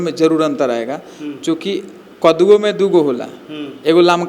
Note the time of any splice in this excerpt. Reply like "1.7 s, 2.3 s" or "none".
none